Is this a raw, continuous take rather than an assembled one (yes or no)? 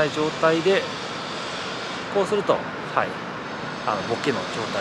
yes